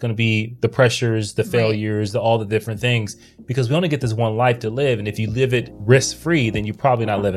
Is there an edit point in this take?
no; 0 cuts

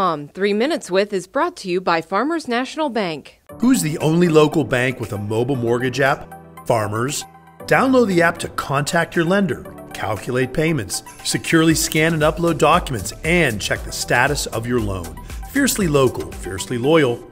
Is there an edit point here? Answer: no; 0 cuts

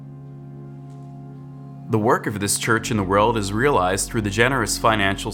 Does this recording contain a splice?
yes; 1 cut; at 1.9 s

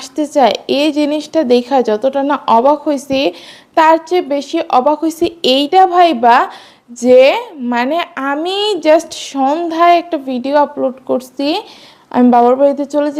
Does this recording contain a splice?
no; 0 cuts

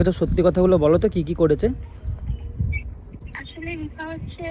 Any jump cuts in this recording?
no; 0 cuts

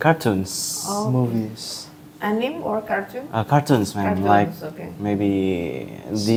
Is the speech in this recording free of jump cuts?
yes; 0 cuts

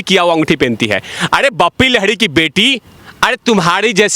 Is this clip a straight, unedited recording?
no; 1 cut; at 2.9 s

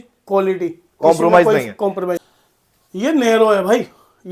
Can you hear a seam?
yes; 1 cut; at 2.2 s

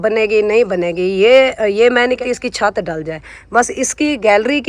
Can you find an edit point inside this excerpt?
yes; 1 cut; at 2.2 s

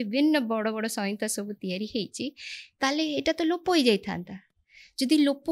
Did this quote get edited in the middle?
no; 0 cuts

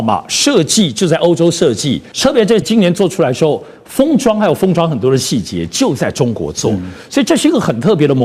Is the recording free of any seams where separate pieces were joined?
no; 1 cut; at 2.4 s

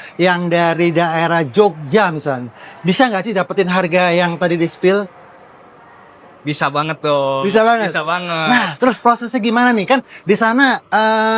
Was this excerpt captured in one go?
yes; 0 cuts

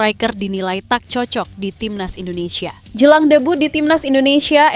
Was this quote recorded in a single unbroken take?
no; 1 cut; at 2.8 s

